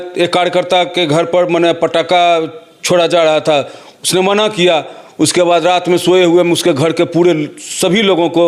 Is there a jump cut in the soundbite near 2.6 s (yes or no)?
no